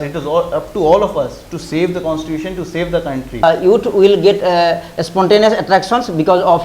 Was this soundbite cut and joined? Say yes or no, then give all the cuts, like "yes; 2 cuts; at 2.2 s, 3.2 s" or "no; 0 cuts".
yes; 1 cut; at 3.4 s